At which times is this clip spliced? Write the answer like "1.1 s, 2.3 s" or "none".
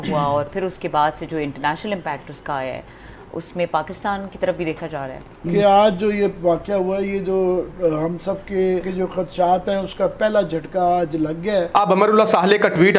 5.0 s, 8.9 s, 11.8 s